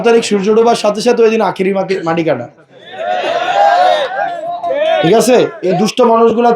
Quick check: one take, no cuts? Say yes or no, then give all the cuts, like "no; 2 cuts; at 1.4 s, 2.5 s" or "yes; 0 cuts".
no; 1 cut; at 5.6 s